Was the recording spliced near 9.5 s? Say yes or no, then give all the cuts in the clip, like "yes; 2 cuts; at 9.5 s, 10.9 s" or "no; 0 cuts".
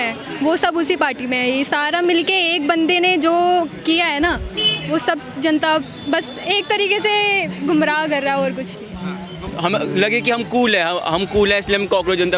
yes; 1 cut; at 9.5 s